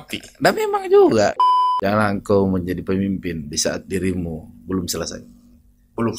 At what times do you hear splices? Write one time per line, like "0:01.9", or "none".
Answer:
0:01.4